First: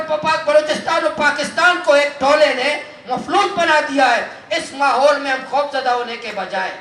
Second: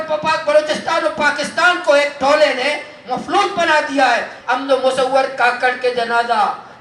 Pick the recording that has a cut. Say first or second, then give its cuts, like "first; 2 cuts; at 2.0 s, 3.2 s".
second; 1 cut; at 4.3 s